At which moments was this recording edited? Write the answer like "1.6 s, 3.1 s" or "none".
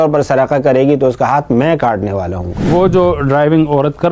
2.6 s